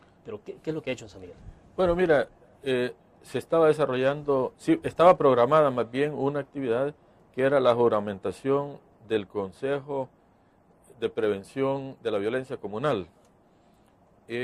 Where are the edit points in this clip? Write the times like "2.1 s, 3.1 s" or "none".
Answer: none